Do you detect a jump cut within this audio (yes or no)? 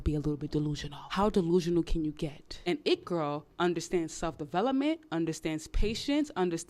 yes